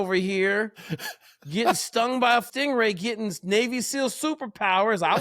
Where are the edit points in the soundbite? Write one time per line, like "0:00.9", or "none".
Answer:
0:02.5